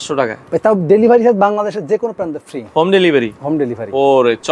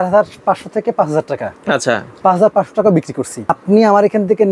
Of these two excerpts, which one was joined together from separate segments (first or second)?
second